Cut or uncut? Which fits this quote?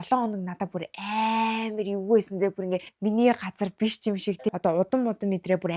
cut